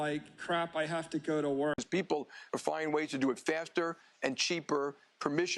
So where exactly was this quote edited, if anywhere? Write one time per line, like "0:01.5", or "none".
0:01.8